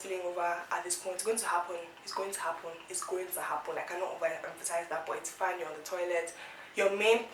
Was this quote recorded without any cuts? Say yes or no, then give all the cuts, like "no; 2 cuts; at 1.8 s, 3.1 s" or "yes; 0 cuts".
yes; 0 cuts